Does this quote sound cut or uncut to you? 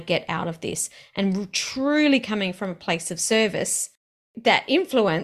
cut